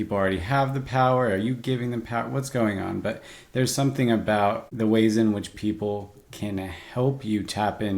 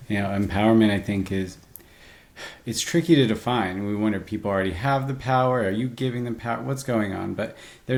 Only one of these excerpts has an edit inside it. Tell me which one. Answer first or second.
first